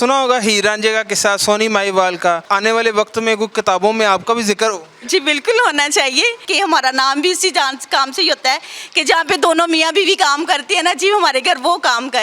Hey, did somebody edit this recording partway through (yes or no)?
yes